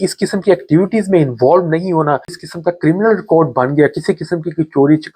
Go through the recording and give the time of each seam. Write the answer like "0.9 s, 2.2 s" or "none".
2.4 s